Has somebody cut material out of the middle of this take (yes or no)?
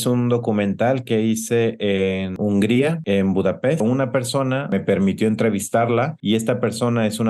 yes